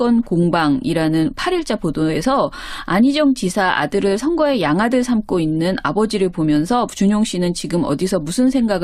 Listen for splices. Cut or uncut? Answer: cut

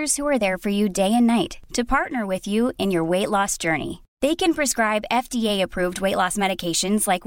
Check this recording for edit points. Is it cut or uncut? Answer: uncut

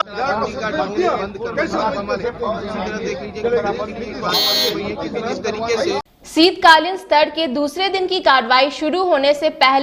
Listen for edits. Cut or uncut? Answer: cut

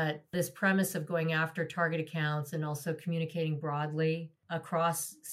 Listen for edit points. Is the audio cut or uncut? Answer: uncut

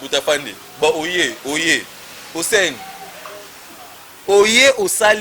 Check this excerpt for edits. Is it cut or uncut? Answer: uncut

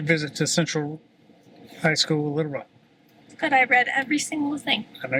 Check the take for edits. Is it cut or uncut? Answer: uncut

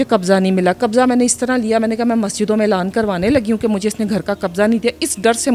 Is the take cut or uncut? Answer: uncut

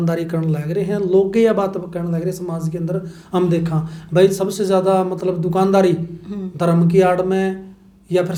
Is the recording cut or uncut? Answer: uncut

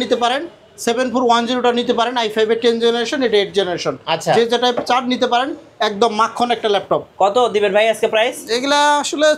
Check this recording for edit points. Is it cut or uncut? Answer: uncut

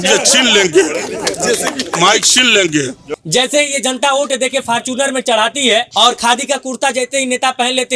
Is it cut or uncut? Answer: cut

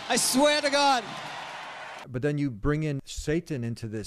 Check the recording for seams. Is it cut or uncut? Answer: cut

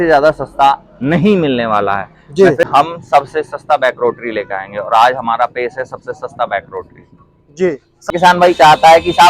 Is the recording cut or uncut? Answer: cut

